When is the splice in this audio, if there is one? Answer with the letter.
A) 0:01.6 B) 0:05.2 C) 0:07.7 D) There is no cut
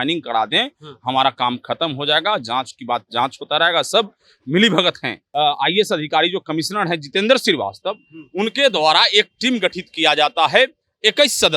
B